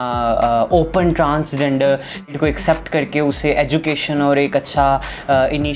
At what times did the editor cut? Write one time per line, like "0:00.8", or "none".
0:02.3